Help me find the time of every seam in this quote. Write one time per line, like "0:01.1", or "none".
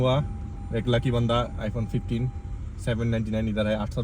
none

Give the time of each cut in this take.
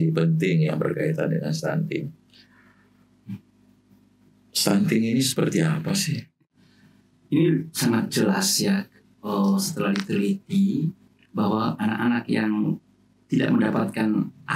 0:06.4

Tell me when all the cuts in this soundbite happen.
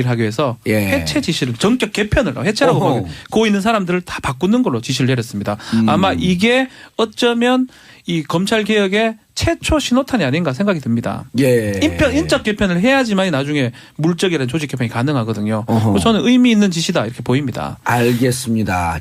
0:13.7

